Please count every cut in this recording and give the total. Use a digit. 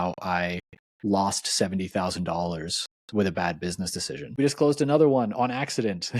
1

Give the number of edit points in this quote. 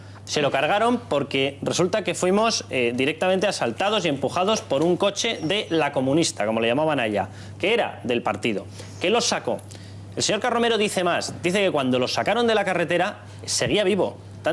1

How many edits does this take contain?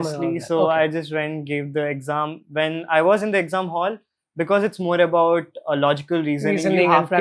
0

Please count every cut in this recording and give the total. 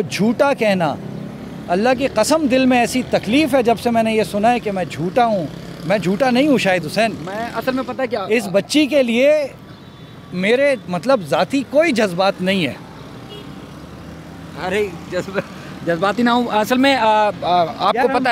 0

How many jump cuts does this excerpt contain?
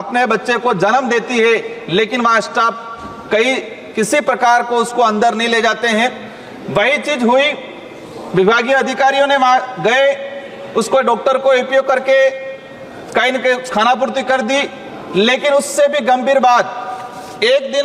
0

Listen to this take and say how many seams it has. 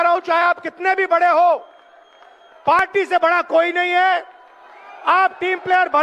0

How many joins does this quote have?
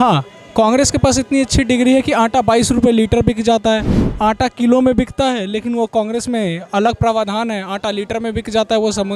0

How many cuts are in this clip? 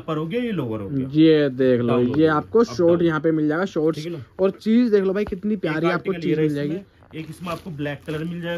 0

